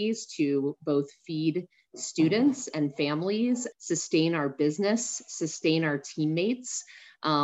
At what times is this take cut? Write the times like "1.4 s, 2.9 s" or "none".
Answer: 3.7 s